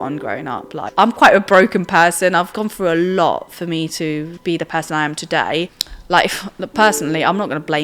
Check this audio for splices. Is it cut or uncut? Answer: cut